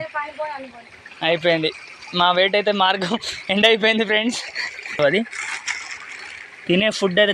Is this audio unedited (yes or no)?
no